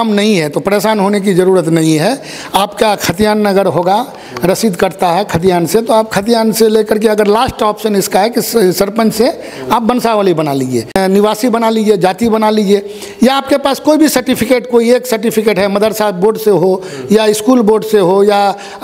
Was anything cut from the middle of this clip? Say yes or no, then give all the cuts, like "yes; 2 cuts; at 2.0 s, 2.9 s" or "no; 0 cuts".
yes; 1 cut; at 10.9 s